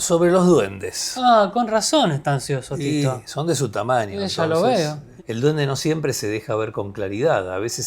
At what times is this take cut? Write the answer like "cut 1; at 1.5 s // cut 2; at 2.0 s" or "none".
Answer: cut 1; at 5.0 s